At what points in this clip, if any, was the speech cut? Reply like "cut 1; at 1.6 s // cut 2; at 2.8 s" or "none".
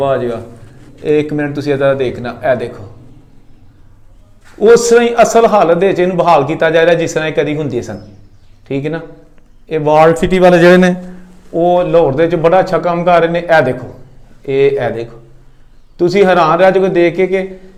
none